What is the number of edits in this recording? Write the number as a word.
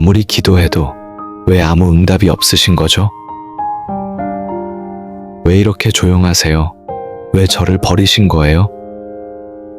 three